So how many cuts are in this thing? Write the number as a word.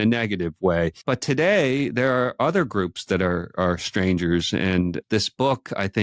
two